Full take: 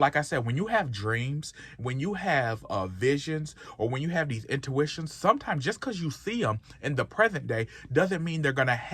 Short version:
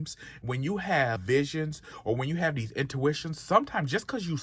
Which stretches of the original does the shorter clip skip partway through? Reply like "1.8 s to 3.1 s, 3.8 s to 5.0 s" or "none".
2.6 s to 2.9 s